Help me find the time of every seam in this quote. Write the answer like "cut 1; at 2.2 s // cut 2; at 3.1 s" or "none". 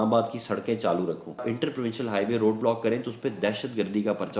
cut 1; at 1.5 s